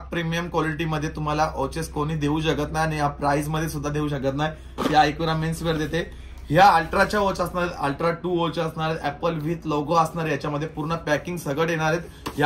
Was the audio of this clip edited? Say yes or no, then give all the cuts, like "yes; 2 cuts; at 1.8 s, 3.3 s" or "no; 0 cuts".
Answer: no; 0 cuts